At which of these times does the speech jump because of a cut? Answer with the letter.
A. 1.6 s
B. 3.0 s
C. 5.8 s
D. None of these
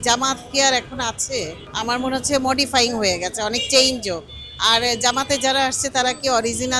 A